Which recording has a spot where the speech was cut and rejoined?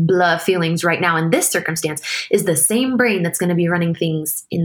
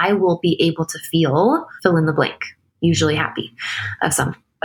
second; 1 cut; at 1.7 s

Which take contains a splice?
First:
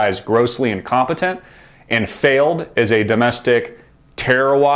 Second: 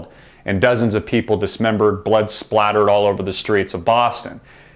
second; 1 cut; at 2.8 s

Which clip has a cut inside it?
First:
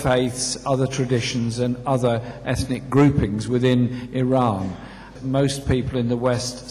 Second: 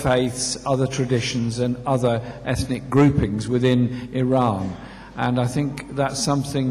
first; 1 cut; at 5.0 s

